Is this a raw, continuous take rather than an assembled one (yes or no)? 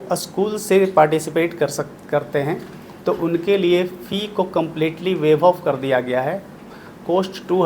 yes